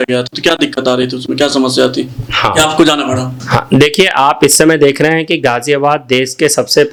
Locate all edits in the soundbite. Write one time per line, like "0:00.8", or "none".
none